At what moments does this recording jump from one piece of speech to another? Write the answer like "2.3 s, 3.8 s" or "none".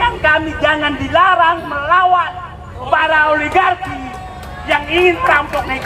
none